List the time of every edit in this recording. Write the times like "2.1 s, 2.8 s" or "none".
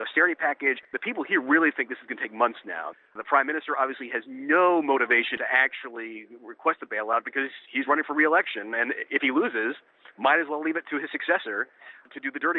0.9 s, 2.8 s, 5.4 s